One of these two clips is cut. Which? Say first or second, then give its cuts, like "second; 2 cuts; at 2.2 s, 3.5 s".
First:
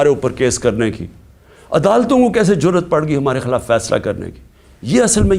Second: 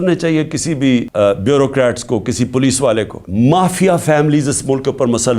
second; 2 cuts; at 1.1 s, 3.2 s